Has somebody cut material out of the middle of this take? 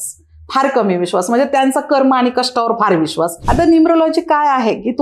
yes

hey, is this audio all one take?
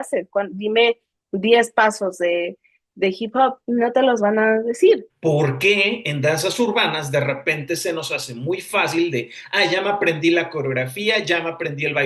no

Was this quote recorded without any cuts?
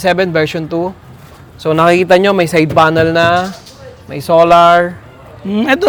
yes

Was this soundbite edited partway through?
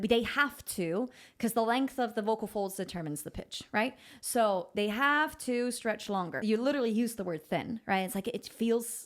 yes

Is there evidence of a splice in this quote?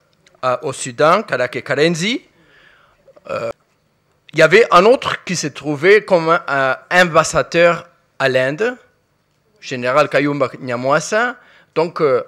yes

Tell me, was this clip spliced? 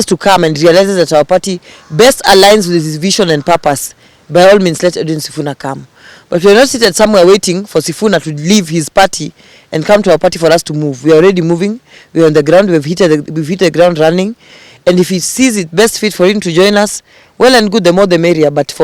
no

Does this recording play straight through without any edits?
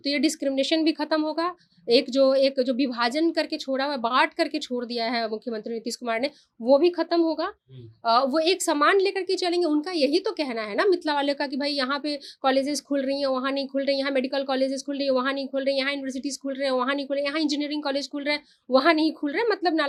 yes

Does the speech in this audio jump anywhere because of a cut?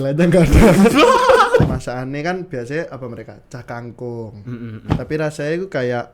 yes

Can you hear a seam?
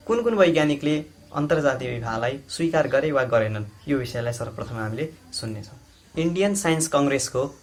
no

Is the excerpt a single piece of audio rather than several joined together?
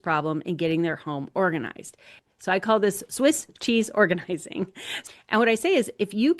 no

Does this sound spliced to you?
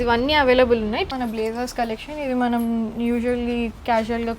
yes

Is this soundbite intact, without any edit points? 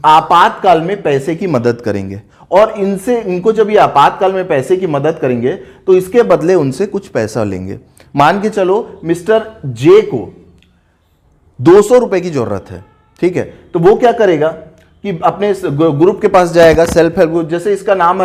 yes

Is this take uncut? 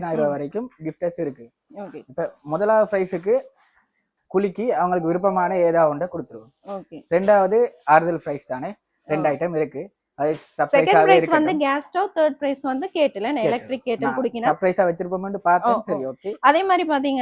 yes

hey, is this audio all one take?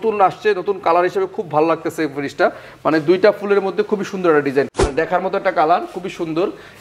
no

